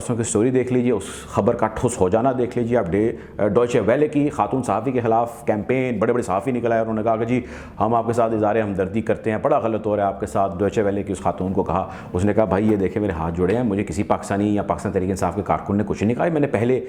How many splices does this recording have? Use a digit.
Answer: 0